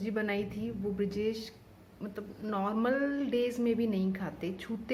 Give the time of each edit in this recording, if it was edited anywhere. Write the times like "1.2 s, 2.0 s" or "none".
none